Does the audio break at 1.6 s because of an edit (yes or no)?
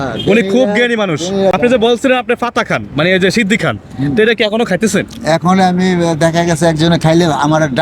yes